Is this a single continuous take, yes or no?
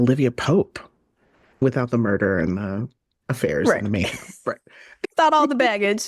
no